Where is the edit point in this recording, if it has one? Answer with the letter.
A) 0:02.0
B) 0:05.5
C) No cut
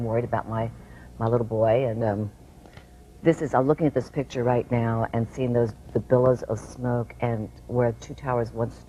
C